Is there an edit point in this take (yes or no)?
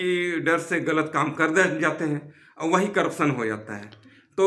no